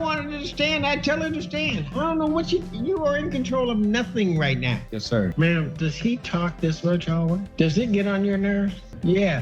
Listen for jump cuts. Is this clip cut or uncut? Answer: cut